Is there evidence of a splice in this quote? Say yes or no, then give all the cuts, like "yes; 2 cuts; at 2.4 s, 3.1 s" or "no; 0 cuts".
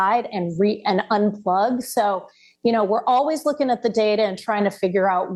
no; 0 cuts